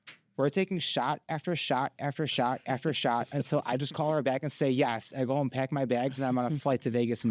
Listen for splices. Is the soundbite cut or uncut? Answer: uncut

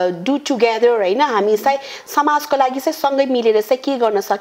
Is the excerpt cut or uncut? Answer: uncut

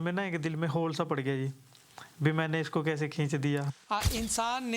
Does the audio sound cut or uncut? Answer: cut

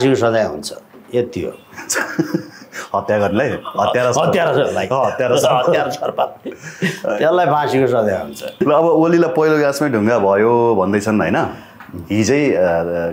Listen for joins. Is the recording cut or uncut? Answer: cut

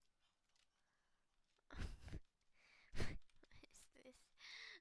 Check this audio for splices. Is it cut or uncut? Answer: uncut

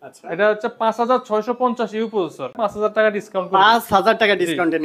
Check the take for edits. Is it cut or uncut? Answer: cut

